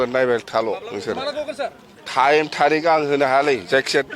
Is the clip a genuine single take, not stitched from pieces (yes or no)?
yes